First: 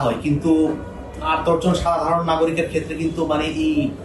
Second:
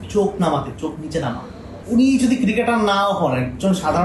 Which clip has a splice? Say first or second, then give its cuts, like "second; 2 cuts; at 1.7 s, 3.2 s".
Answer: second; 1 cut; at 1.8 s